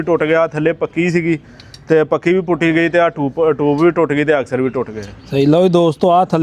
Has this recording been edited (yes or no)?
no